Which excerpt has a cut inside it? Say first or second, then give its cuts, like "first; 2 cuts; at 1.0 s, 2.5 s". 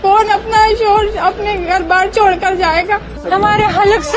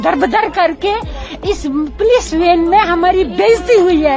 first; 1 cut; at 3.1 s